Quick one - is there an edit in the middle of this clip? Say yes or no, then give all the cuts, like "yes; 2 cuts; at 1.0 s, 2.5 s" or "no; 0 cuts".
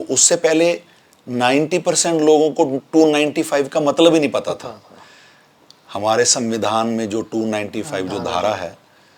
no; 0 cuts